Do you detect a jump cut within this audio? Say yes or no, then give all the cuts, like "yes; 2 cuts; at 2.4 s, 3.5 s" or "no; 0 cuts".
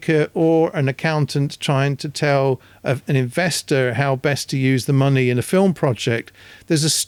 no; 0 cuts